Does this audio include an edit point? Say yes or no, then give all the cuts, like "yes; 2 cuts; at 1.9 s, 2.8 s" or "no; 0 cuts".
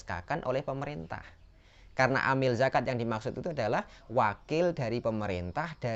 no; 0 cuts